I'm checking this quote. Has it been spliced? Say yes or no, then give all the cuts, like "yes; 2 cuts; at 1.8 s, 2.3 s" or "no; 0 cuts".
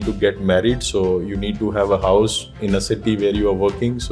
no; 0 cuts